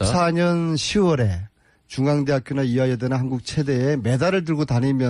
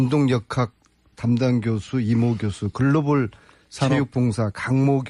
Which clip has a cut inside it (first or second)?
second